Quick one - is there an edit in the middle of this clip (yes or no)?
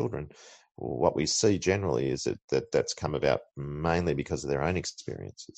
no